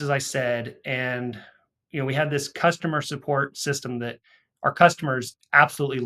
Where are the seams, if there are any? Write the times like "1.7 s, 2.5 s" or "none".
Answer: none